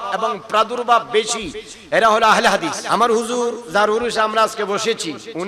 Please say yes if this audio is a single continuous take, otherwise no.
no